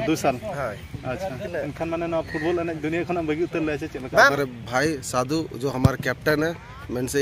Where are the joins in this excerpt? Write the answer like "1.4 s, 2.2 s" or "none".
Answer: 1.4 s, 4.3 s